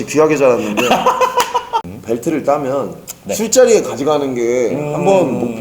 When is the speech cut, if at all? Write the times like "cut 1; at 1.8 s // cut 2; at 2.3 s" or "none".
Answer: cut 1; at 1.8 s

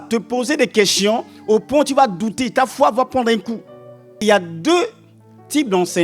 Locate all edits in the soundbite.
cut 1; at 4.2 s

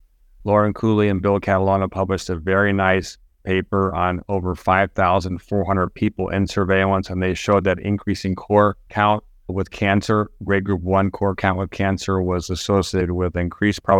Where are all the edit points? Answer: cut 1; at 9.1 s

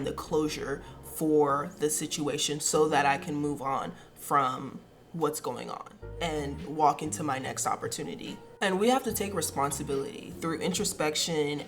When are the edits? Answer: none

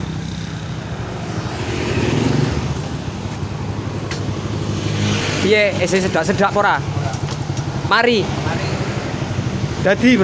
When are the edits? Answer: none

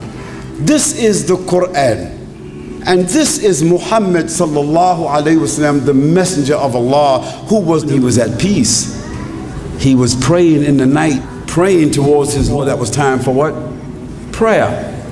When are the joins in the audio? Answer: cut 1; at 7.9 s // cut 2; at 11.3 s // cut 3; at 12.6 s

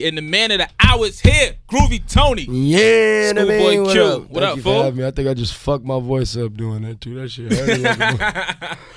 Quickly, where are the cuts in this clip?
cut 1; at 4.3 s

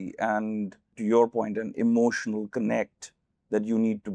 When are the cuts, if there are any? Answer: cut 1; at 0.9 s

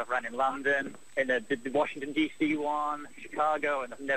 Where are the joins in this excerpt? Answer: none

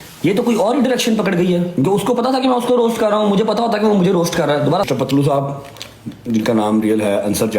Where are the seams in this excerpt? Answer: cut 1; at 4.9 s

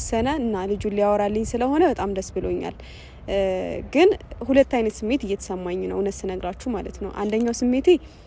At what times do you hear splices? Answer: none

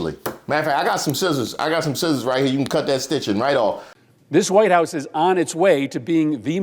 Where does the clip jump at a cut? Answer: cut 1; at 3.9 s

